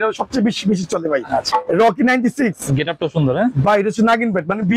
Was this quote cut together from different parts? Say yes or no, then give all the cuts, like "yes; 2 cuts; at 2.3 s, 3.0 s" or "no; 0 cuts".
no; 0 cuts